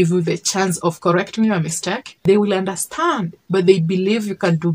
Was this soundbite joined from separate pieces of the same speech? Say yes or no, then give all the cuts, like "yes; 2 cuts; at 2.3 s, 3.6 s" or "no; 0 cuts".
yes; 1 cut; at 2.1 s